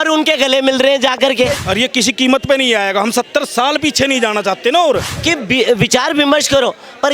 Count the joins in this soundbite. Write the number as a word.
two